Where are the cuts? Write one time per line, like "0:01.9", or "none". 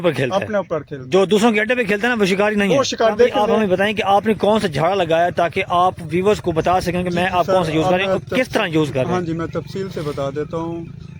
0:03.3